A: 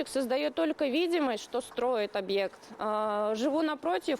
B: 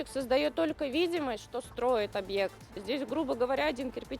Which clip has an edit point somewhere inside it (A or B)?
B